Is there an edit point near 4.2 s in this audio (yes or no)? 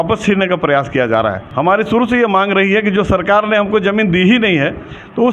no